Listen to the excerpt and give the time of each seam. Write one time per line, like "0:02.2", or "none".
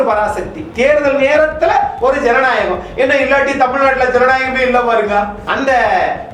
0:05.4

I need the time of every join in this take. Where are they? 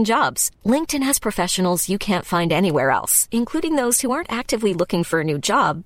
none

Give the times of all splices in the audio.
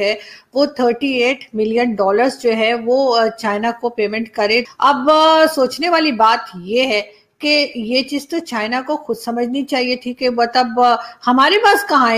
0:04.6

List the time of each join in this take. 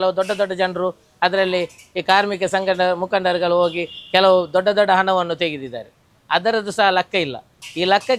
none

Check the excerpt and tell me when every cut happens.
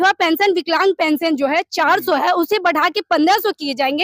none

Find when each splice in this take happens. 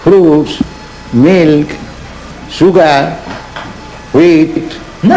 0:01.6

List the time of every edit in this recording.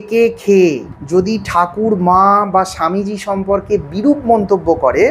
0:00.9

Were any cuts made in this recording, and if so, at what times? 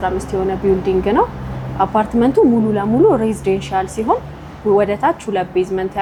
none

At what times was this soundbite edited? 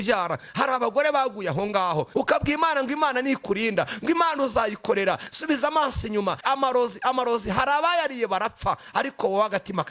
0:02.1
0:06.4

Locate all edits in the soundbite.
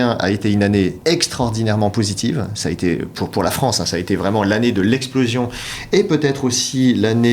0:01.0

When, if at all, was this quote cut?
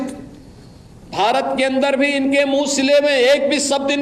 none

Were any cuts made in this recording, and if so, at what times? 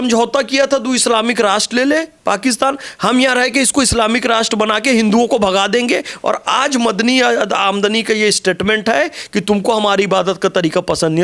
none

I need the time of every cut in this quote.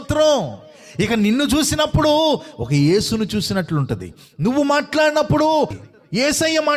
0:05.8

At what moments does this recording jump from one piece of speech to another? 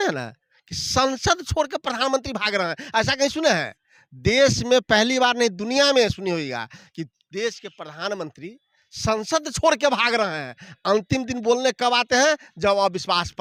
none

